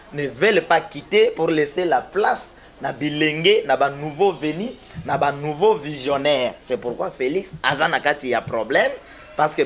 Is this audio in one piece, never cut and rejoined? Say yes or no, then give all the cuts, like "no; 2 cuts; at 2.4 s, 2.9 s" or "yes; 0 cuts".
yes; 0 cuts